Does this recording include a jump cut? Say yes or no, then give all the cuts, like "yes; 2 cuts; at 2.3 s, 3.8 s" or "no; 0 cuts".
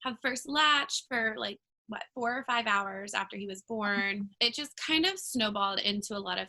yes; 1 cut; at 4.3 s